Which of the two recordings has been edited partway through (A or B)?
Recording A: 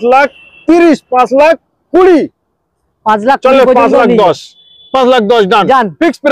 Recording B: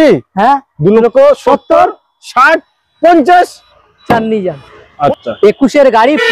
B